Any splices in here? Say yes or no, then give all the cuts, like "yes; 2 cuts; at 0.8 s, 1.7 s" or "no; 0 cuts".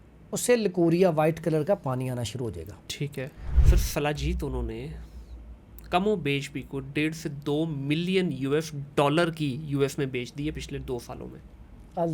yes; 1 cut; at 3.5 s